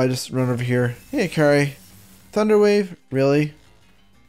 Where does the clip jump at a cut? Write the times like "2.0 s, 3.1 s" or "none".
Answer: 1.0 s